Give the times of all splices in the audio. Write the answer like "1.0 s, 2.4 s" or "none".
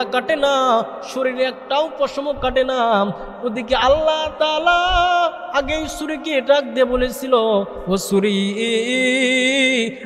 none

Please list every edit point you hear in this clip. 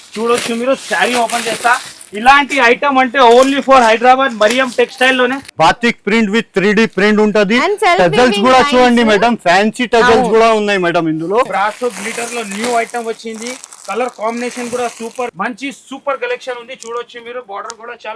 5.4 s, 11.5 s, 15.3 s

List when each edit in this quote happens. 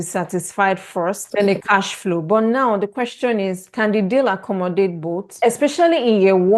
1.2 s, 5.3 s

